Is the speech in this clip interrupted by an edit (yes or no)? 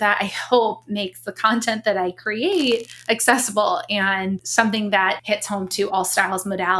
yes